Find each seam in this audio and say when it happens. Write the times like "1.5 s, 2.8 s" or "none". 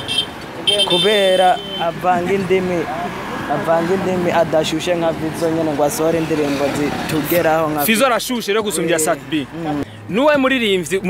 9.8 s